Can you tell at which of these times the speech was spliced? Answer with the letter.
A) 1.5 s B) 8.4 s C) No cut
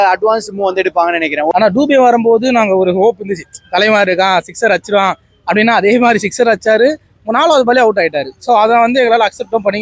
A